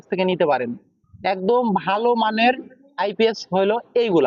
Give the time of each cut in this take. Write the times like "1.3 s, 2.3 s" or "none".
none